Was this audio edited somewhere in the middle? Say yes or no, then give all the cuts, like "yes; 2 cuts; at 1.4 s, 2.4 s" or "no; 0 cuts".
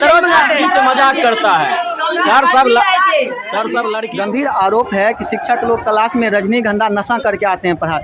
yes; 1 cut; at 4.0 s